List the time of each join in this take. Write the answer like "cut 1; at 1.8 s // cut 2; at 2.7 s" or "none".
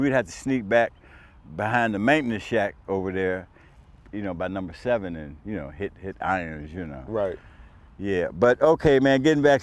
none